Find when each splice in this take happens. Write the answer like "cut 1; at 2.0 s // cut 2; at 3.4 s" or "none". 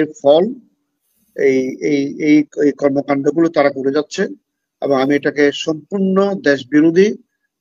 none